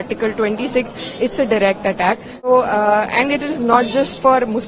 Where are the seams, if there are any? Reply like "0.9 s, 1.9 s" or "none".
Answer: 2.5 s